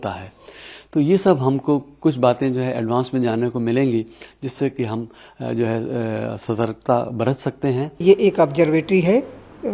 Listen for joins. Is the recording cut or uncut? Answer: cut